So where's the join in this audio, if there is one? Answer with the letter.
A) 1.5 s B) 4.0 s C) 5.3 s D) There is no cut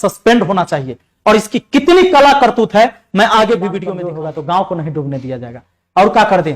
B